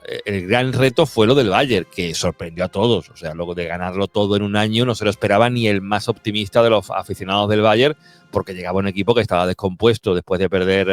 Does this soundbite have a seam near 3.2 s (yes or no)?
no